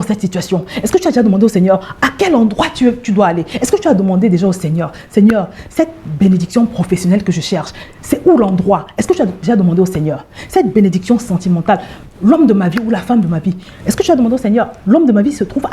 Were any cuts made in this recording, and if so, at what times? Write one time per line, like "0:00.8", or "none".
0:03.5